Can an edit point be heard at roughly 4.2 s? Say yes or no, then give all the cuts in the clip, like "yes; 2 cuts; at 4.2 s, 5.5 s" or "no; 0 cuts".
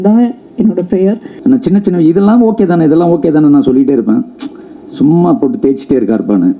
no; 1 cut; at 1.3 s